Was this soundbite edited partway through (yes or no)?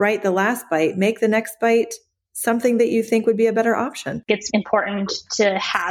yes